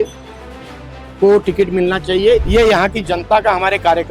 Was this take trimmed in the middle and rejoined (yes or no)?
yes